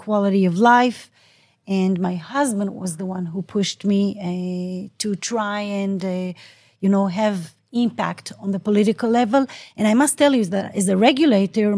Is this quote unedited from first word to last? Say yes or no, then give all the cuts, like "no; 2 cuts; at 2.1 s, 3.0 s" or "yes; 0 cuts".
yes; 0 cuts